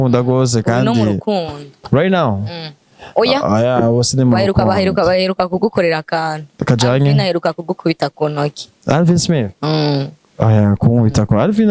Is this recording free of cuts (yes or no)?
yes